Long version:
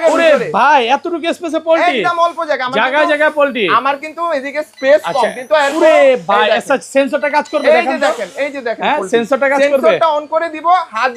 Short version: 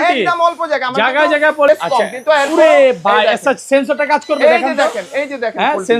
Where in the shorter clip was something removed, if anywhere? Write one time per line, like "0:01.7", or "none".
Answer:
0:01.7

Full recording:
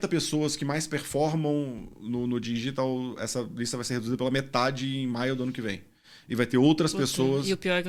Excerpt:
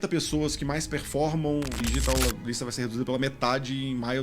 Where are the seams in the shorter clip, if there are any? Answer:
0:02.0

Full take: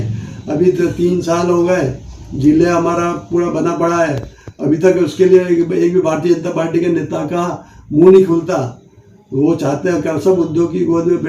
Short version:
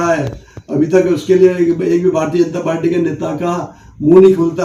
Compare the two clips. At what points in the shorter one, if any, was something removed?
none

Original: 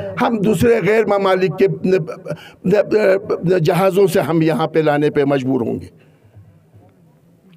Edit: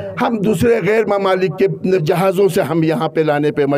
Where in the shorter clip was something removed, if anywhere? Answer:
0:02.0

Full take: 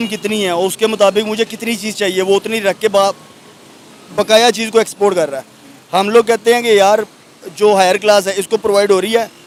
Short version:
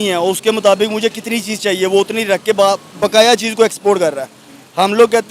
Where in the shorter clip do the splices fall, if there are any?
0:02.9

